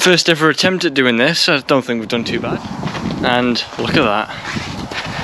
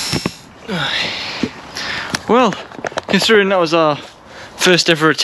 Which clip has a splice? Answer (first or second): first